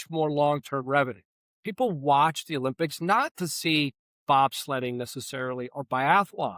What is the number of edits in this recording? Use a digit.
1